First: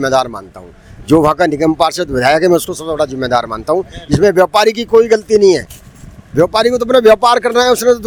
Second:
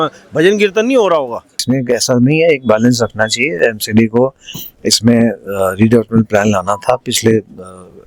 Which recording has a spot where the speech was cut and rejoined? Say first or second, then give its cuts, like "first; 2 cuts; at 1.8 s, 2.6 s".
second; 1 cut; at 1.6 s